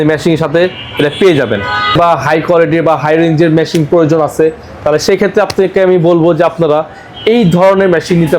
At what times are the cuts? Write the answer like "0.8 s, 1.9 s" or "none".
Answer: 2.0 s